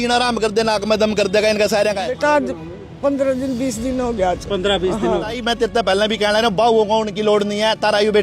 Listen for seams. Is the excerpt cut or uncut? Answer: cut